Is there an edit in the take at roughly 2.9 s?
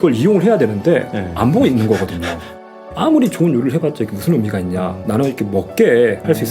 yes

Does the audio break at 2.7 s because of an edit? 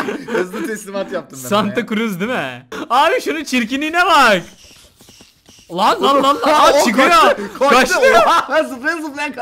yes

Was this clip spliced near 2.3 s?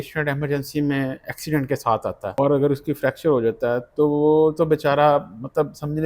yes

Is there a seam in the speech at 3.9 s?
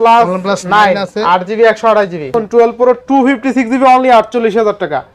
no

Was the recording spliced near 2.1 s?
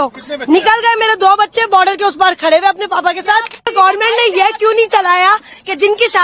no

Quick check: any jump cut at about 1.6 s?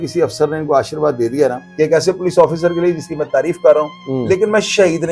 yes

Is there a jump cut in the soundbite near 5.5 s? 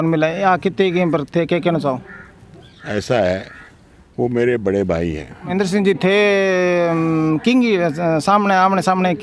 yes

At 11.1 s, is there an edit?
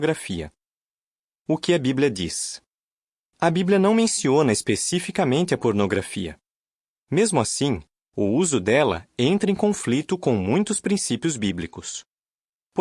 no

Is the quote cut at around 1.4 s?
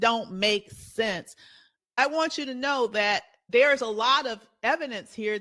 no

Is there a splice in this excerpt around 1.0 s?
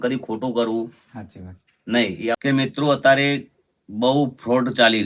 no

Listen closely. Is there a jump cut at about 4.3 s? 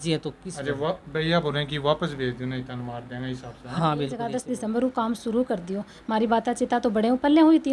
yes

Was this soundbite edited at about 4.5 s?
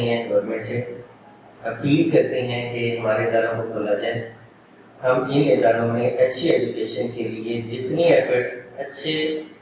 no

